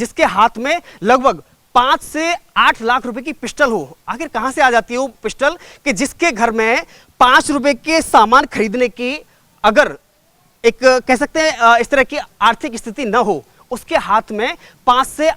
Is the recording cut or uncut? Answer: uncut